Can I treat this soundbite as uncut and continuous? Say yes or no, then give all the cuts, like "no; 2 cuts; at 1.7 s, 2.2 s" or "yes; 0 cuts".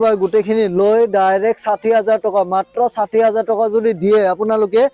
yes; 0 cuts